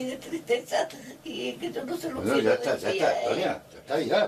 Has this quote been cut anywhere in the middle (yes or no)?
no